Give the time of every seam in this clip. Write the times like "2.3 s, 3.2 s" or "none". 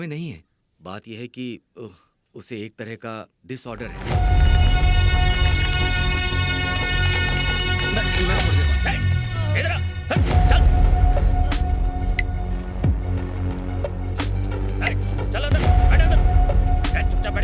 4.0 s, 8.5 s